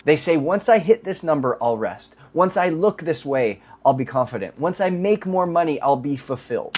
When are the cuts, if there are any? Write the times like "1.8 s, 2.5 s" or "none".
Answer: none